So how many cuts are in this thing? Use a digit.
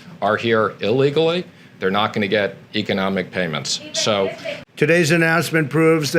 1